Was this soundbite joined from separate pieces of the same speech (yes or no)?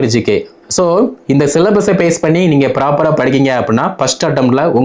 no